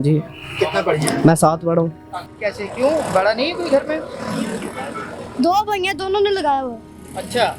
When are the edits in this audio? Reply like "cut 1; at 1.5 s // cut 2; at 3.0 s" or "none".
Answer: cut 1; at 2.2 s